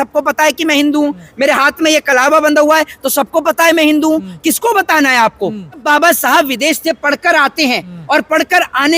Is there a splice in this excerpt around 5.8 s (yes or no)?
yes